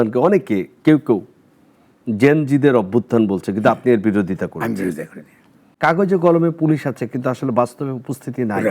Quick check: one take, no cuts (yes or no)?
no